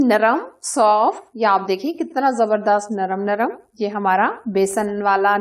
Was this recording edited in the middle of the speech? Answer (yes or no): no